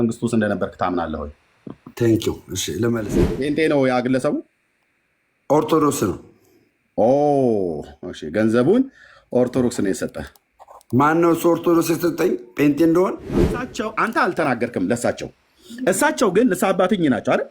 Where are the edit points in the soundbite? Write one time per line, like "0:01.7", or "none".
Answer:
0:03.0
0:13.4